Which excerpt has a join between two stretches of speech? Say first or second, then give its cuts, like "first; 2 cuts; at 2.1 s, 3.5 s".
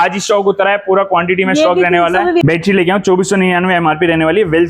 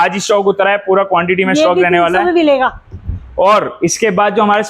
first; 1 cut; at 2.4 s